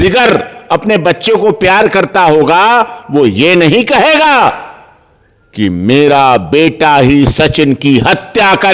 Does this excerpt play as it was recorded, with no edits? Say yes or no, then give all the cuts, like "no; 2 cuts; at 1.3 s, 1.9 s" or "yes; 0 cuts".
yes; 0 cuts